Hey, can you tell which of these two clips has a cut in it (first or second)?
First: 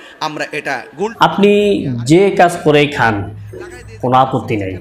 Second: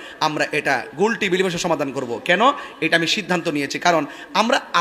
first